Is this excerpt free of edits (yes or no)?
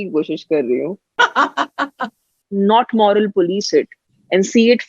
no